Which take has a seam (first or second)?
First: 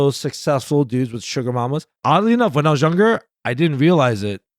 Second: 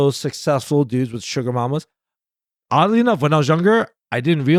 first